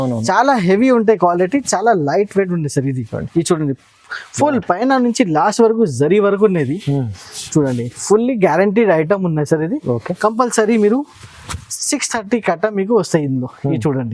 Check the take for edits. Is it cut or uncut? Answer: uncut